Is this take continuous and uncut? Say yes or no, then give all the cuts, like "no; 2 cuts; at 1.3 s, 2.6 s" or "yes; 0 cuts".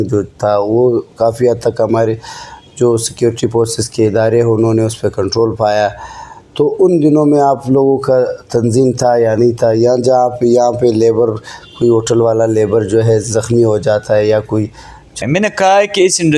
no; 1 cut; at 15.1 s